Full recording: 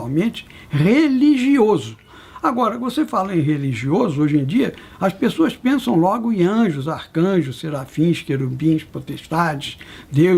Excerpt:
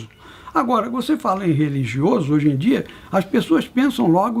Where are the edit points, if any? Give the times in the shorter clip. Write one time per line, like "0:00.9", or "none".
none